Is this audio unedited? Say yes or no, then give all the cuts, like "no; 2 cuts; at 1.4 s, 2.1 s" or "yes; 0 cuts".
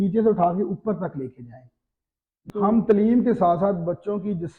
no; 1 cut; at 2.5 s